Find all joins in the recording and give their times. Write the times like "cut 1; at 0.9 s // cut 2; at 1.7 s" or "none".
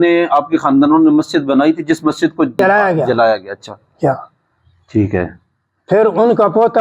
cut 1; at 2.6 s